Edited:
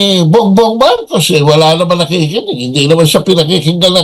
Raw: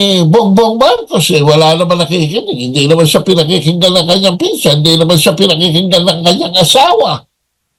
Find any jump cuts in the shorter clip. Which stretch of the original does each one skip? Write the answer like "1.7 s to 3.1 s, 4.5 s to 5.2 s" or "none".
none